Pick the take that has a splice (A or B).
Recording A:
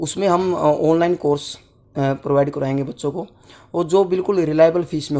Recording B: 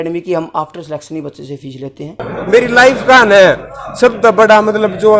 B